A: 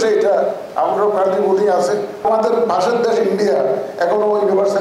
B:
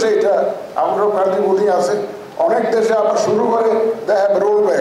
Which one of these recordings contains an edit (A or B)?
A